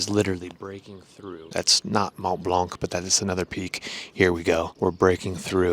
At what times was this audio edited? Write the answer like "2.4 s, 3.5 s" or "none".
1.4 s, 4.7 s